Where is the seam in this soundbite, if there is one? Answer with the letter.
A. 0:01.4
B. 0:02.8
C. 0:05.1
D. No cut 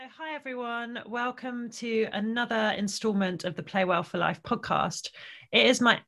D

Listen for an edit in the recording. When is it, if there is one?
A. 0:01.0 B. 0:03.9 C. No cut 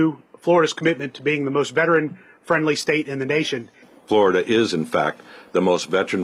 B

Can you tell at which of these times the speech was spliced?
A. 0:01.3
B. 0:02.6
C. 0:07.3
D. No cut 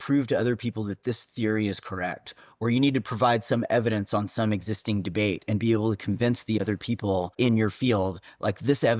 C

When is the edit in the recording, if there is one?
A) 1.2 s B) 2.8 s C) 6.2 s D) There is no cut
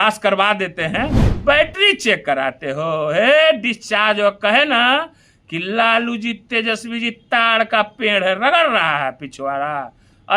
A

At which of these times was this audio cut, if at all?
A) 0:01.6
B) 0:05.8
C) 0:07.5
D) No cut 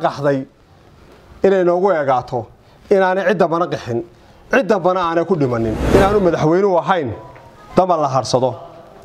B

